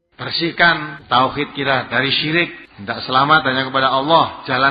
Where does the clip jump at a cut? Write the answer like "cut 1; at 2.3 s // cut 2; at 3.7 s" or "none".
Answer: cut 1; at 0.9 s // cut 2; at 2.7 s